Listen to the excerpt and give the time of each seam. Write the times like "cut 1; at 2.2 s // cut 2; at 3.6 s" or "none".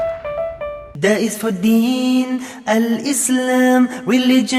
cut 1; at 0.9 s